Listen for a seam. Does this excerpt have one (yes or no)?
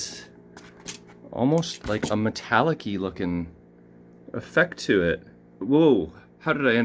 no